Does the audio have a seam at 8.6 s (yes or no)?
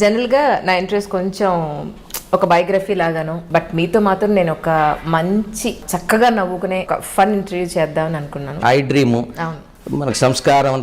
yes